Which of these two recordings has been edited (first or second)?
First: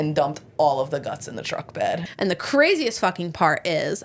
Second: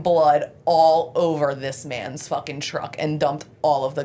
first